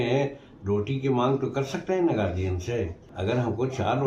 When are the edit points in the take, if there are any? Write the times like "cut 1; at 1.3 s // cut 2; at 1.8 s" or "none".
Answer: cut 1; at 3.0 s